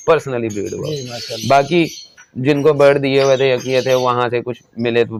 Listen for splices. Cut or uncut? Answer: uncut